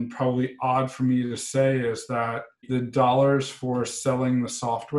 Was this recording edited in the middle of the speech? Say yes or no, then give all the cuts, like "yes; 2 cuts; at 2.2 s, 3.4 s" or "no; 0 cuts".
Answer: no; 0 cuts